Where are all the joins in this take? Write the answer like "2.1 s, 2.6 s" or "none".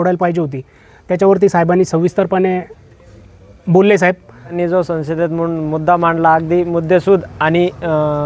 4.5 s